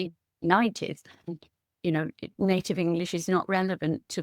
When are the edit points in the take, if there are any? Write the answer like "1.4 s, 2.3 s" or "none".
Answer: 1.3 s